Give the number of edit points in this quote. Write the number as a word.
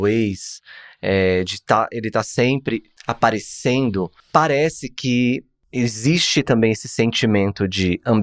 three